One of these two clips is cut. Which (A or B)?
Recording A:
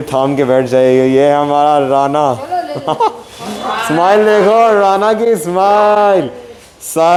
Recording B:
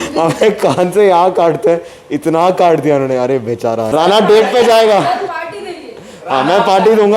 B